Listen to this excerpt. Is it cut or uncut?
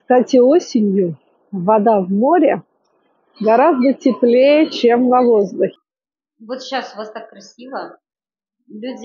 cut